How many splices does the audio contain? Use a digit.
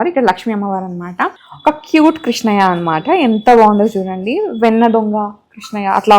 1